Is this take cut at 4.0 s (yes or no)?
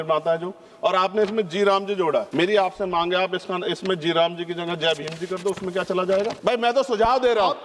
no